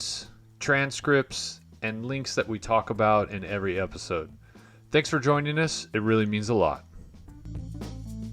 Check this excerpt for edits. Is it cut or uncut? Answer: cut